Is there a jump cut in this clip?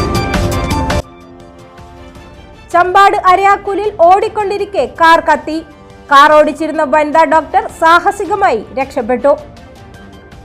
yes; 1 cut; at 1.0 s

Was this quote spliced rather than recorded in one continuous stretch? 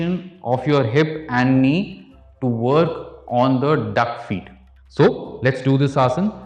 no; 0 cuts

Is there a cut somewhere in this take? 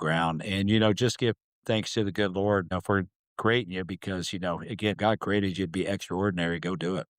yes; 1 cut; at 5.0 s

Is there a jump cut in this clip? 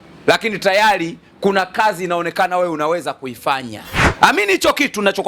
yes; 1 cut; at 4.1 s

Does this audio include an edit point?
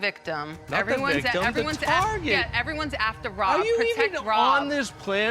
no; 0 cuts

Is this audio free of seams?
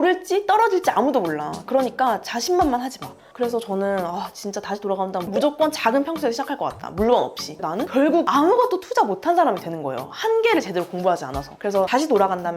no; 2 cuts; at 3.2 s, 7.6 s

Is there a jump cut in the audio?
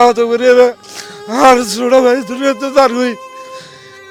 no; 0 cuts

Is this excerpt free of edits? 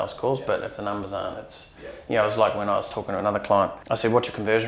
no; 1 cut; at 3.8 s

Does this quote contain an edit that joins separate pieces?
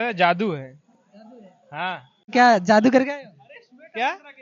yes; 1 cut; at 2.3 s

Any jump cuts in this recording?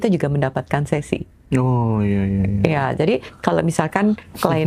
no; 0 cuts

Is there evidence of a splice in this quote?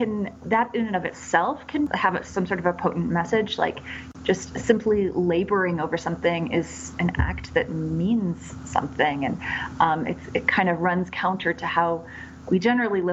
yes; 1 cut; at 1.9 s

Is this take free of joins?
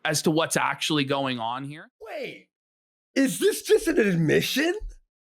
no; 1 cut; at 1.6 s

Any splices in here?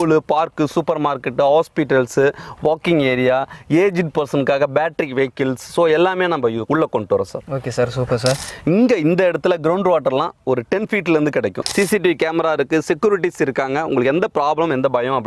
yes; 3 cuts; at 6.6 s, 8.5 s, 11.6 s

